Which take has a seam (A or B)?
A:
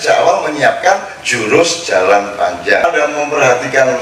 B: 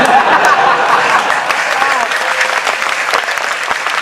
A